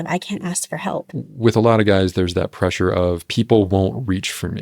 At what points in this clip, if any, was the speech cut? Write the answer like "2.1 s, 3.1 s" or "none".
1.1 s